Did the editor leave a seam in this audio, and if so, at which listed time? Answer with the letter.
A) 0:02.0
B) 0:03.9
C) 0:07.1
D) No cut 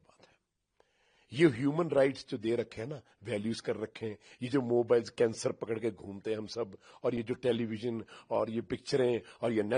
D